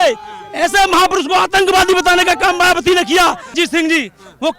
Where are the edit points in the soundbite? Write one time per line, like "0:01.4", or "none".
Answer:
0:03.5